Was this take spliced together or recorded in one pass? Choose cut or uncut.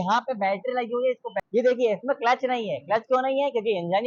cut